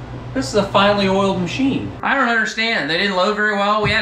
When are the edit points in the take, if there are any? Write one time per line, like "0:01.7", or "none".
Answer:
0:01.9